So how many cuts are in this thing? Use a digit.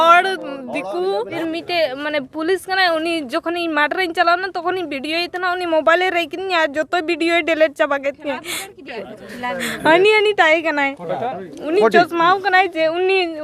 1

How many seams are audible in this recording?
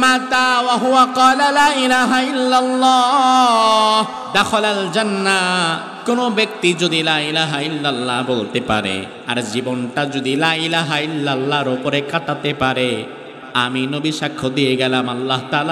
3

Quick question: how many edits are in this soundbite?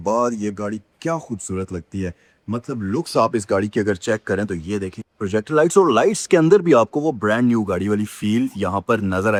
0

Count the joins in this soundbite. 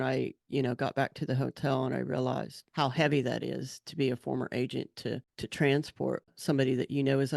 3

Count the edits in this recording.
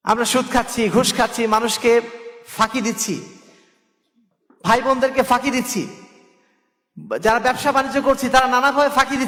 0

